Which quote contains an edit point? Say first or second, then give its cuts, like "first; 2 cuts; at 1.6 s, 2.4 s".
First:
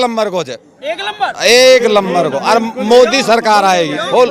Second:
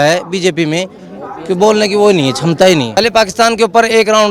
second; 1 cut; at 2.9 s